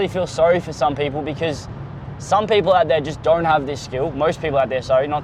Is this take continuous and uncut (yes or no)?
yes